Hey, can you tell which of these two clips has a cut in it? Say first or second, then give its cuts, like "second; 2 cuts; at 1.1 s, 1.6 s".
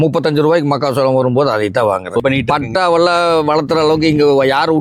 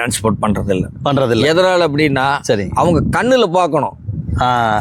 first; 1 cut; at 2.2 s